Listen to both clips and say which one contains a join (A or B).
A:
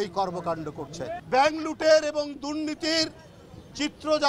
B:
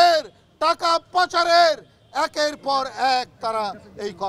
A